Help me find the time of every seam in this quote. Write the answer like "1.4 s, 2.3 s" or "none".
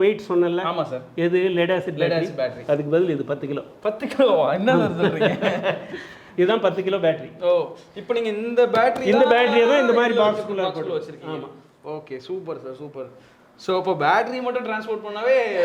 none